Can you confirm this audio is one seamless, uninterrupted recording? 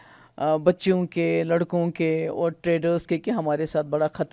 yes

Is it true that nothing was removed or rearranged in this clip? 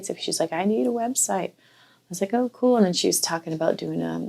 yes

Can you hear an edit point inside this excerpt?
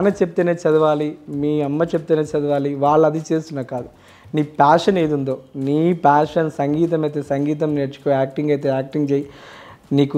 no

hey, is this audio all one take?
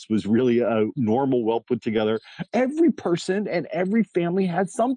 no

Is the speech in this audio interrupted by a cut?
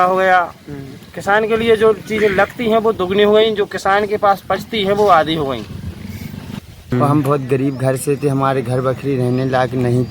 yes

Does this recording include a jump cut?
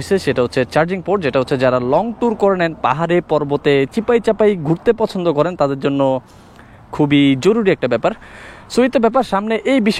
no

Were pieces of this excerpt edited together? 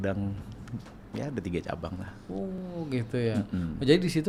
no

